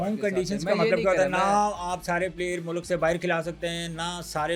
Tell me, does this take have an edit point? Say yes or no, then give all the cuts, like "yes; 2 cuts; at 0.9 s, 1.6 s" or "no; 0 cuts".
no; 0 cuts